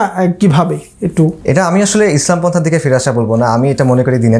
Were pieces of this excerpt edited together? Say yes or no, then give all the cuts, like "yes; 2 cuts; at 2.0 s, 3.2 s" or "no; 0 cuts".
yes; 1 cut; at 1.4 s